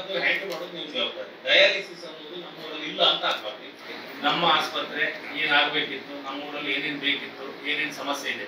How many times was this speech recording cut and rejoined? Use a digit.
1